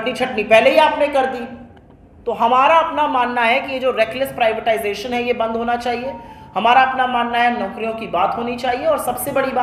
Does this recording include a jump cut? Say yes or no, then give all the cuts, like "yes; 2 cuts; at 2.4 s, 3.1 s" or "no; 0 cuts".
no; 0 cuts